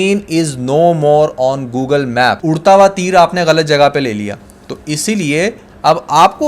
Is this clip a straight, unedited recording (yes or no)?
no